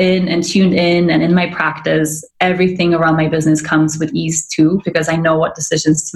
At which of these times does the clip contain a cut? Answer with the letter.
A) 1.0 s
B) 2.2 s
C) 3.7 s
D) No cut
B